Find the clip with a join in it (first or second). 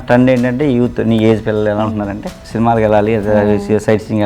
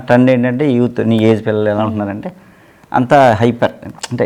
first